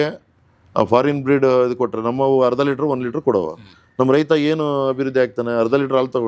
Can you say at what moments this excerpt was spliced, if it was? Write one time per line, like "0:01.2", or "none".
none